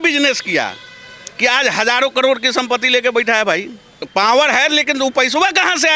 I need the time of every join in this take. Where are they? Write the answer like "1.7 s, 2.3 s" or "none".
4.0 s